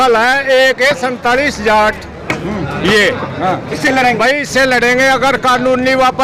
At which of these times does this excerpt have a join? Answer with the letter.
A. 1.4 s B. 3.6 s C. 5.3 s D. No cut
B